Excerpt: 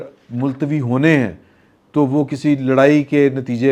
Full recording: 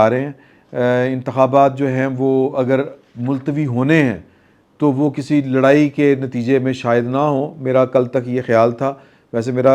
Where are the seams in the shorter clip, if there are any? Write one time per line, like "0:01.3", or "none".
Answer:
none